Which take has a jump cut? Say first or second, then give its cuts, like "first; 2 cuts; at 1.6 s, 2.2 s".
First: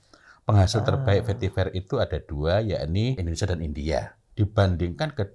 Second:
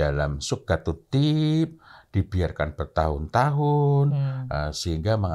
first; 2 cuts; at 3.2 s, 4.2 s